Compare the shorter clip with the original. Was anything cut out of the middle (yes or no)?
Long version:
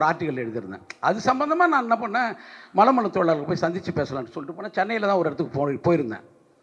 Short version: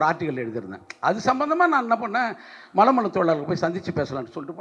no